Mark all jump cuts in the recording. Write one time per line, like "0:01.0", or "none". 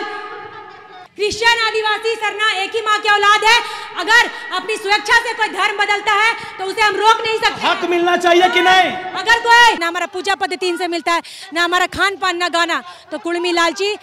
0:01.0
0:09.8